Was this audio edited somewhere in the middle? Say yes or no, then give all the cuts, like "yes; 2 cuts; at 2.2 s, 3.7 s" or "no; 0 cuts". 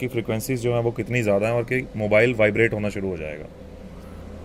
no; 0 cuts